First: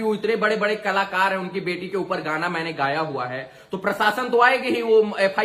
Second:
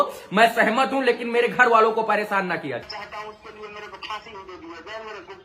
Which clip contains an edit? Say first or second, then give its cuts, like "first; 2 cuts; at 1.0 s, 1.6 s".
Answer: second; 1 cut; at 2.8 s